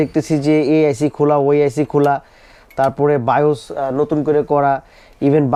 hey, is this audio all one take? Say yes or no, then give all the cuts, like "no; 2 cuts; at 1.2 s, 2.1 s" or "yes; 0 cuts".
yes; 0 cuts